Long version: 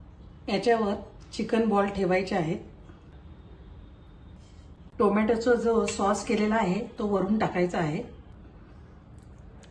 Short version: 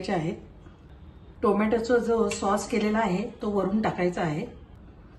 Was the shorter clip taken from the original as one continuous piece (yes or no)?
no